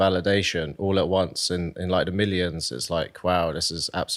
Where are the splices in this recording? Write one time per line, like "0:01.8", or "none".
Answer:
none